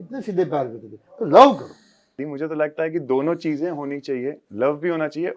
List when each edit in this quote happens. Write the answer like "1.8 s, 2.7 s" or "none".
2.3 s